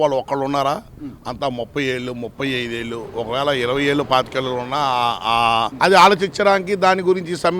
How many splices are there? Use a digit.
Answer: 1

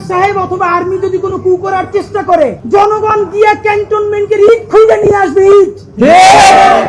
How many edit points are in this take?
1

